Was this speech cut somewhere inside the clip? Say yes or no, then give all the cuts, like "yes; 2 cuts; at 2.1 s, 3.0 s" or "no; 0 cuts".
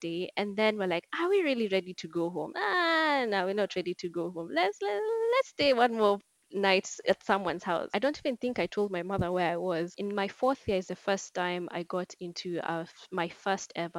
yes; 2 cuts; at 7.9 s, 9.9 s